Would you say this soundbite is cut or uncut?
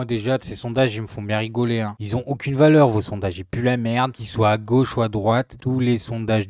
uncut